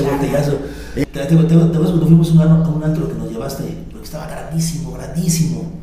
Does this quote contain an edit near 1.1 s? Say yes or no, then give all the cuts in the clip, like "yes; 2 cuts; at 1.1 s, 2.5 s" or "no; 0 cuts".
yes; 1 cut; at 1.1 s